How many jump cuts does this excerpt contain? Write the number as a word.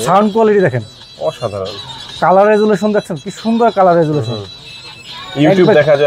zero